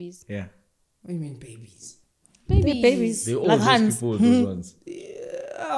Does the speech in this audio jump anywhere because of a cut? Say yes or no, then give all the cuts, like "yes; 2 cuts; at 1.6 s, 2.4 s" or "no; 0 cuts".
no; 0 cuts